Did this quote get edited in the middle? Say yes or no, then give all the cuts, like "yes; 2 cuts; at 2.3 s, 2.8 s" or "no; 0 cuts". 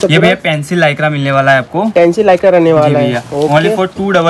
no; 0 cuts